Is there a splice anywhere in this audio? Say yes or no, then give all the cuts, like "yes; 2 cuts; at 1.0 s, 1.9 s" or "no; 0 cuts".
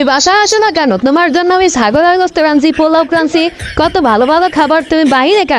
no; 0 cuts